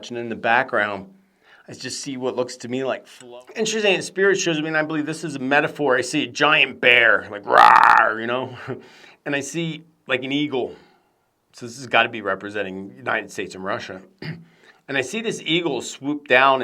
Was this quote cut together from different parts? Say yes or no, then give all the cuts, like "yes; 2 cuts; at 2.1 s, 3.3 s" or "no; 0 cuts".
yes; 1 cut; at 3.1 s